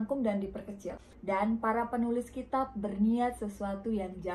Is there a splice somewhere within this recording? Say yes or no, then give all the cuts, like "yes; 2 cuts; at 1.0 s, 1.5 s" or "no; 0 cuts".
yes; 1 cut; at 1.1 s